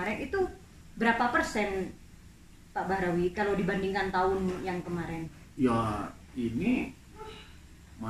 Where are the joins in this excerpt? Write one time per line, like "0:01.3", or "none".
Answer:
none